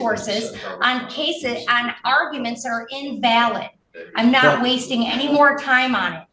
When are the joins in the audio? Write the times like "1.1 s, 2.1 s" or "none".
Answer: none